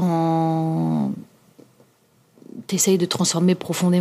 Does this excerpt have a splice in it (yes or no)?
no